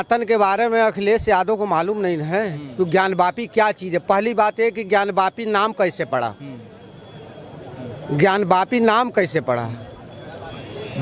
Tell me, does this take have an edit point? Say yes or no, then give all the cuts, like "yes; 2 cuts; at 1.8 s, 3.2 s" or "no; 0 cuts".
no; 0 cuts